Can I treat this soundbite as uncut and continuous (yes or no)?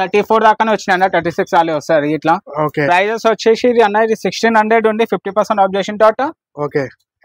yes